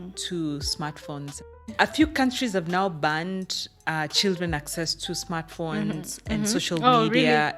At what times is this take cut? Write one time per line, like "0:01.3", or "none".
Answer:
0:01.6